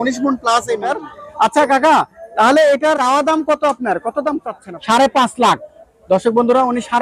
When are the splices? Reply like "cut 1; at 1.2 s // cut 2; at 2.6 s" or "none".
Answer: cut 1; at 0.9 s // cut 2; at 3.0 s // cut 3; at 4.6 s